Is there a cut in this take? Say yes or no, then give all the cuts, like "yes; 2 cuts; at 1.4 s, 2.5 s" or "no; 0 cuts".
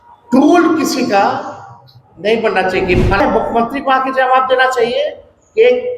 yes; 1 cut; at 3.2 s